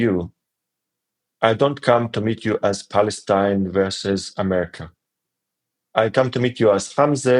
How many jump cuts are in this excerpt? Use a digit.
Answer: 0